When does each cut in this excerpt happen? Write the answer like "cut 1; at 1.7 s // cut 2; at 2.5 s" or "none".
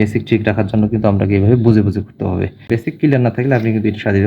cut 1; at 2.7 s